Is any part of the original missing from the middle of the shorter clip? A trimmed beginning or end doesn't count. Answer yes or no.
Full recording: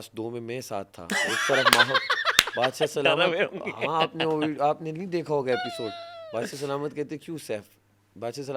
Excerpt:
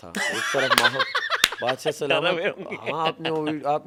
no